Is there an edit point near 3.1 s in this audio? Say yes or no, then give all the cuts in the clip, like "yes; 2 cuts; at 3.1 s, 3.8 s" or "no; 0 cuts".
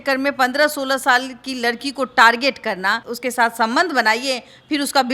yes; 1 cut; at 3.1 s